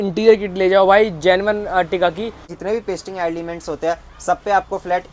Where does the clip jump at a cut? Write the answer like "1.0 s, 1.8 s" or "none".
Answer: 2.5 s